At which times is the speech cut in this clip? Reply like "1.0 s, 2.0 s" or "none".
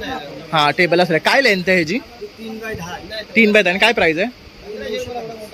none